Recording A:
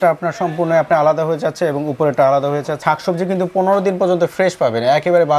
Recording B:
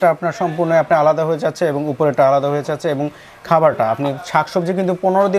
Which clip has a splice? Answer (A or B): A